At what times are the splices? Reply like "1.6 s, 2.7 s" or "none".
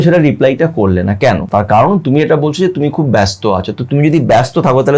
1.4 s